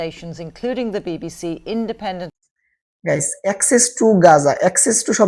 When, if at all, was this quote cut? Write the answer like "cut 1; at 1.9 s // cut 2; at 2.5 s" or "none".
none